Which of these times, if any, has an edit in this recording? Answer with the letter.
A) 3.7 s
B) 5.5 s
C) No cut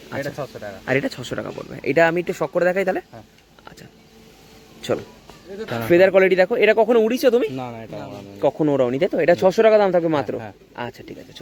C